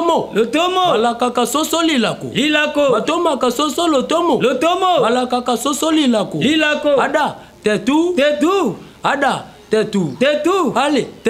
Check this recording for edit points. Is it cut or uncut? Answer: uncut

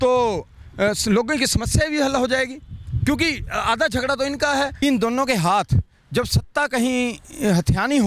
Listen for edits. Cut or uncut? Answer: cut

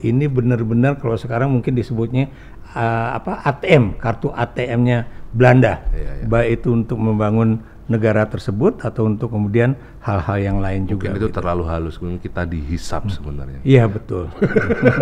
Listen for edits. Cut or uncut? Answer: uncut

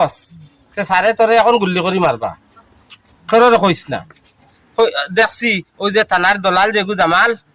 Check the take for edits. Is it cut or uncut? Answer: cut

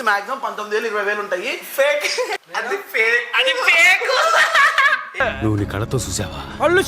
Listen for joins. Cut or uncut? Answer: cut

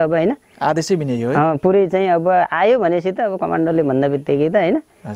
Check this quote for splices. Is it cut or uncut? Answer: uncut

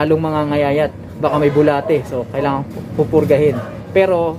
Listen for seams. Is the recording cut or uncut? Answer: uncut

